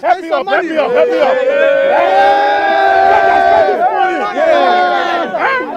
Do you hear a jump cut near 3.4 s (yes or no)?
yes